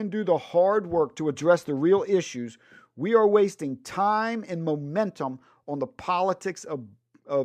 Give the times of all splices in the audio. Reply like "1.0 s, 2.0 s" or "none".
none